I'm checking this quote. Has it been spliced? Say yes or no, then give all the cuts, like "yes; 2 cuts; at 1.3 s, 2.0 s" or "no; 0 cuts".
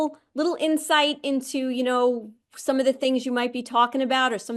no; 0 cuts